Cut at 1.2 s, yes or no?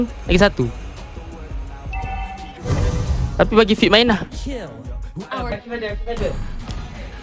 no